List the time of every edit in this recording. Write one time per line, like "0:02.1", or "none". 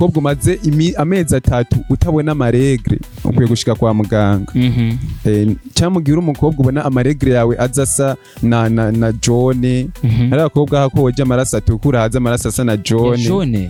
none